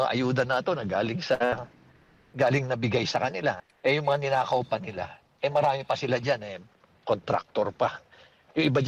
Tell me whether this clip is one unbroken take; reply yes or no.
no